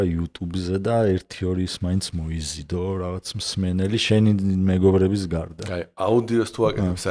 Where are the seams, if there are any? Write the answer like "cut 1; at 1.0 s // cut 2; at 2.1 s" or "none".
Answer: none

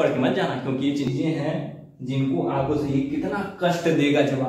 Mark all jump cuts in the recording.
cut 1; at 1.1 s

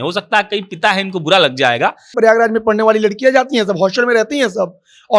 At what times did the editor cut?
cut 1; at 2.1 s

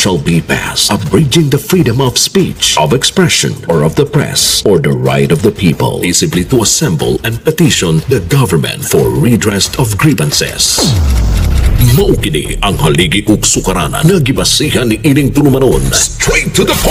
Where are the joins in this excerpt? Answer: none

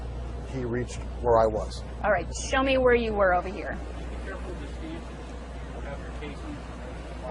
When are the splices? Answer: none

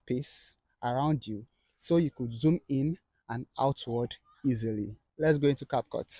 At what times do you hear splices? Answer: cut 1; at 5.0 s

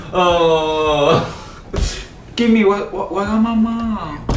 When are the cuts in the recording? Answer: none

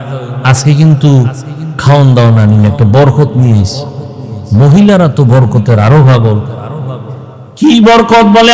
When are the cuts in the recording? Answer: cut 1; at 7.6 s

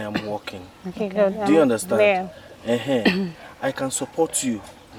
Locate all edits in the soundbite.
none

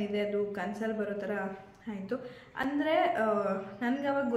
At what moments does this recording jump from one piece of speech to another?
none

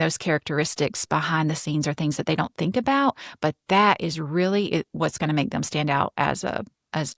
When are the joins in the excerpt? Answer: none

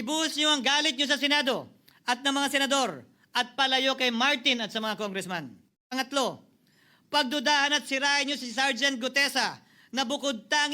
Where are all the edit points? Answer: cut 1; at 5.7 s

